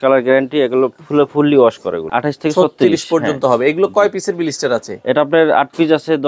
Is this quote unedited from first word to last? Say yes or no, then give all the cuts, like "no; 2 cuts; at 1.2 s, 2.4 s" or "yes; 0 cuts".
no; 1 cut; at 2.1 s